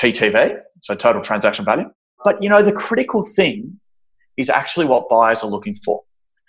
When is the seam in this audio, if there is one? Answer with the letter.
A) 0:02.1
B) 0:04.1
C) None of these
A